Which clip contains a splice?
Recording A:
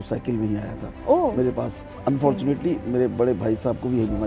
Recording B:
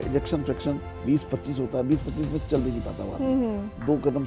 A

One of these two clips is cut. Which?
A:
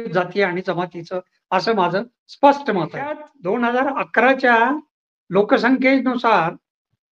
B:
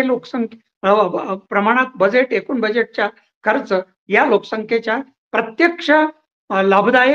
A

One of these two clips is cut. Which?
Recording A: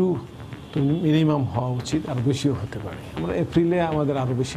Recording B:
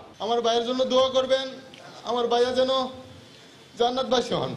A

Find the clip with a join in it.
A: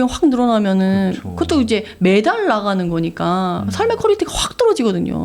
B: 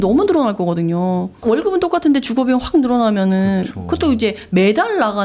B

